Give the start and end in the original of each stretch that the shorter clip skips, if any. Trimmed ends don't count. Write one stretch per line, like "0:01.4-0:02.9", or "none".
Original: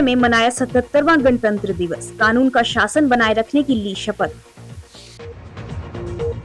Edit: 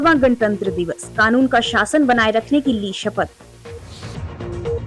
0:04.5-0:05.0